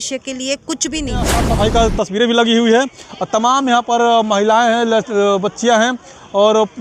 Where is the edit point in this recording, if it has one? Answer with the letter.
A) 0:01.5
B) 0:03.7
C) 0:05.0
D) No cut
A